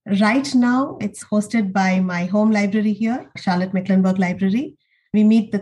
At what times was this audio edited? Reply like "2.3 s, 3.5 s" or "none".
1.1 s, 3.3 s

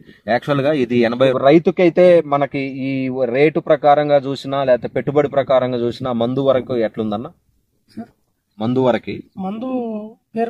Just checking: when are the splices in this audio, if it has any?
1.4 s

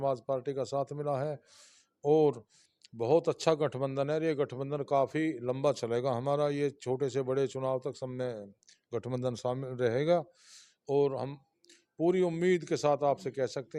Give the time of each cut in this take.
none

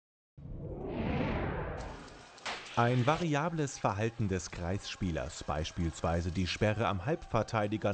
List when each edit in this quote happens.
1.3 s

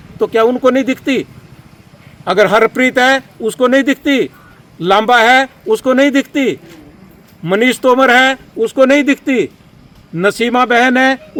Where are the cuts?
none

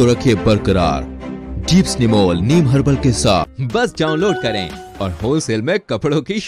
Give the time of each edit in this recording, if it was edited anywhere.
3.5 s

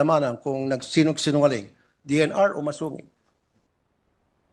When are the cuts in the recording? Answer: none

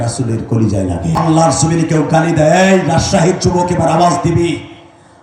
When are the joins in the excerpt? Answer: 1.2 s

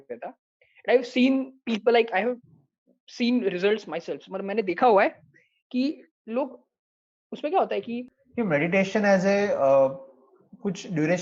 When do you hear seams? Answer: 8.2 s

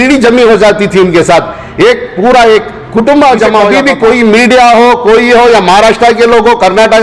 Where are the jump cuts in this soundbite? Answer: 3.8 s

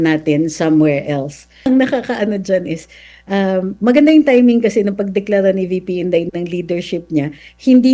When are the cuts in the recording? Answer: 1.7 s

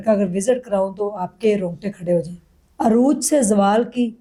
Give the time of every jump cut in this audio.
none

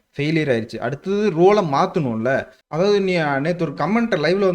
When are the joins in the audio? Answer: 2.6 s

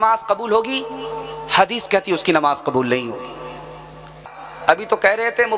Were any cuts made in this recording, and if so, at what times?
4.4 s

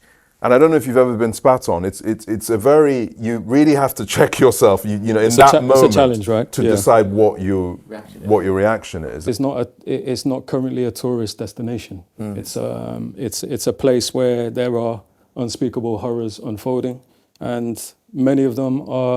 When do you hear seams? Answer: 9.2 s

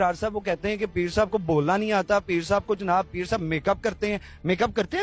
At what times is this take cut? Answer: none

